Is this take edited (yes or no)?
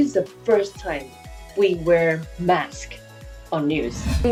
no